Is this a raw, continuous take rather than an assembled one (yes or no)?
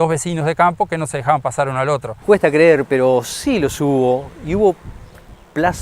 no